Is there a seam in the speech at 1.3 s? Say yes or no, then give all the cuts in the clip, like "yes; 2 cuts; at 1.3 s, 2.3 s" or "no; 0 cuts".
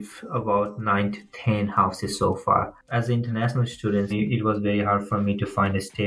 no; 1 cut; at 2.8 s